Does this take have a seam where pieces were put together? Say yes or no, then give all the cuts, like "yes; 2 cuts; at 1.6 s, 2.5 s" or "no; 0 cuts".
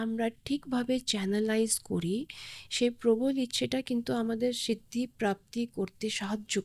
no; 0 cuts